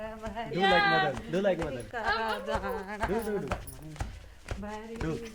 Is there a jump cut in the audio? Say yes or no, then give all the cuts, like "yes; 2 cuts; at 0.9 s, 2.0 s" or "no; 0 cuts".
no; 0 cuts